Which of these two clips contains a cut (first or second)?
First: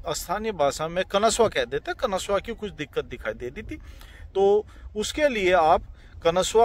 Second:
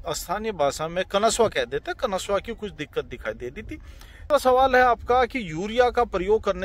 second